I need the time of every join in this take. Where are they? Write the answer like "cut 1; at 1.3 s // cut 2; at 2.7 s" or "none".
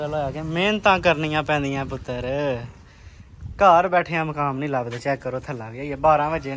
none